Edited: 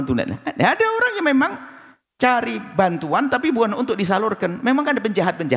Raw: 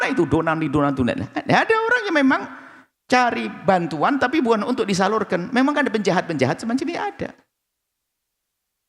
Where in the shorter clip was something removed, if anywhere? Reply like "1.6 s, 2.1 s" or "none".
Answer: none